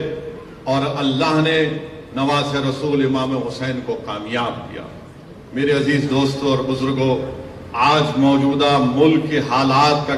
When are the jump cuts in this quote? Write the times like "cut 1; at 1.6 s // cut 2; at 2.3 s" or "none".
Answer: none